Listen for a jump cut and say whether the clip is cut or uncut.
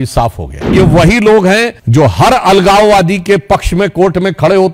cut